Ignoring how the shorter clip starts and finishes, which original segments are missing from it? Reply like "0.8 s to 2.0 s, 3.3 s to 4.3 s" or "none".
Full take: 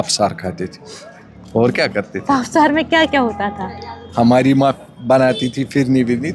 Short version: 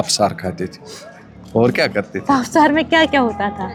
none